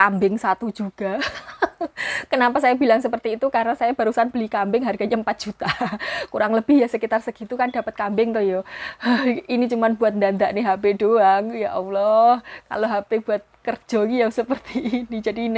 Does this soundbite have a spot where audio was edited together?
no; 0 cuts

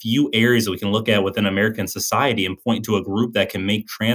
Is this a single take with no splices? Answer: yes; 0 cuts

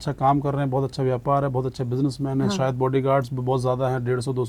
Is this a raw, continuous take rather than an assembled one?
yes; 0 cuts

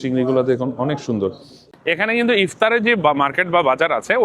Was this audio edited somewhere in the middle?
yes; 1 cut; at 1.6 s

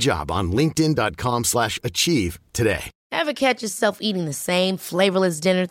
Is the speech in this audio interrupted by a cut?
yes; 1 cut; at 2.9 s

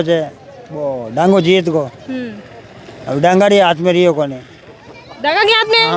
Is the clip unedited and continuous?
yes; 0 cuts

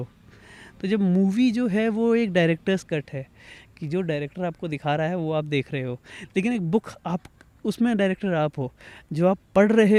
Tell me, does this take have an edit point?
no; 0 cuts

